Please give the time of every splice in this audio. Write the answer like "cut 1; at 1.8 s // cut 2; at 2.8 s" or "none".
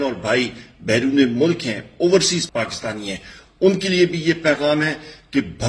cut 1; at 2.4 s